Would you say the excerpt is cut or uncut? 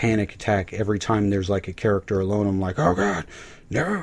uncut